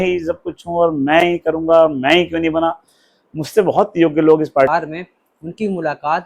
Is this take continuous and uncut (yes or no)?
no